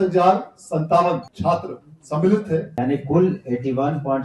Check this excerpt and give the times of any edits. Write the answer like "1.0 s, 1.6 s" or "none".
1.3 s, 2.7 s